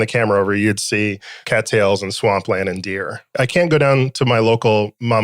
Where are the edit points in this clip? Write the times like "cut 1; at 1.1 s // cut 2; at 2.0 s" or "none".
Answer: cut 1; at 1.3 s // cut 2; at 3.3 s